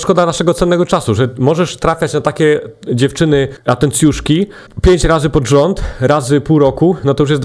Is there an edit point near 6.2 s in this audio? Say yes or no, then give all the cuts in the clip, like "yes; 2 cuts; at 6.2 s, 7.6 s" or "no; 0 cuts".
no; 2 cuts; at 3.6 s, 4.6 s